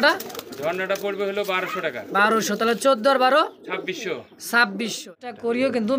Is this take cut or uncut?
cut